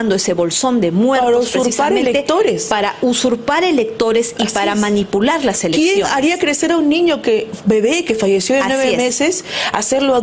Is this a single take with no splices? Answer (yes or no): yes